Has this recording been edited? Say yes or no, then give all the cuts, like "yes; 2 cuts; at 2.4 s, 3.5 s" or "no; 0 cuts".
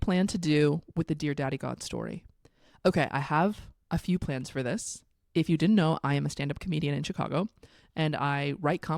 no; 0 cuts